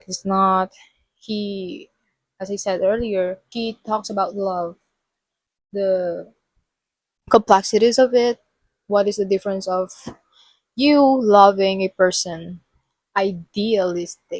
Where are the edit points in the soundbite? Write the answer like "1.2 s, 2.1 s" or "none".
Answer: 3.4 s